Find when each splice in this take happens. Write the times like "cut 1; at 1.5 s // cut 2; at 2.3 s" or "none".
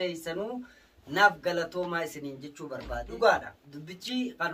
cut 1; at 3.1 s

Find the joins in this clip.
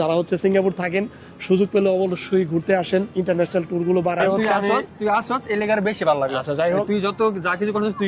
cut 1; at 4.2 s

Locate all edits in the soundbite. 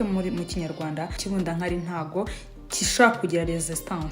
cut 1; at 1.2 s

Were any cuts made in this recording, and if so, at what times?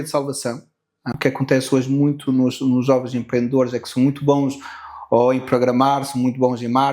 cut 1; at 1.1 s

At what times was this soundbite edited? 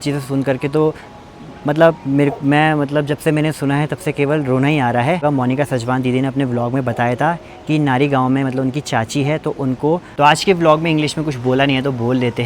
cut 1; at 5.2 s // cut 2; at 10.1 s

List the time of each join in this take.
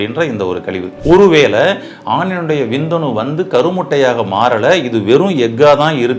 cut 1; at 0.9 s

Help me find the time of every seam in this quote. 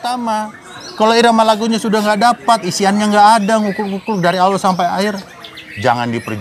none

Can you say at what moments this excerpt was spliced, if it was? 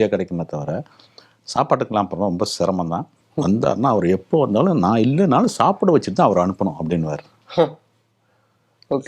cut 1; at 3.2 s

